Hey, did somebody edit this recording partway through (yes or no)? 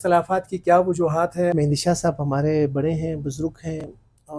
yes